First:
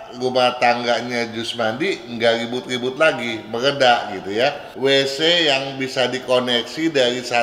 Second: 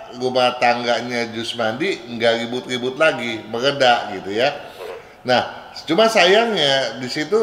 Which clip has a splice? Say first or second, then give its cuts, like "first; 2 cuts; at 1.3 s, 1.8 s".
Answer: first; 1 cut; at 4.7 s